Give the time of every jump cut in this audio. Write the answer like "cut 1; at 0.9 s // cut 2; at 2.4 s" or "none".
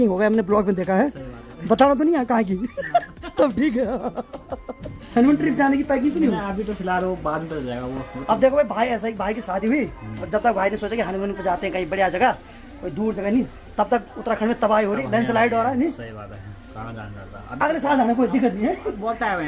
none